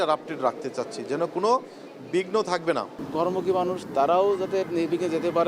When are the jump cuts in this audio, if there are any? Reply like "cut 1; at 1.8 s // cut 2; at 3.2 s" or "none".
cut 1; at 3.0 s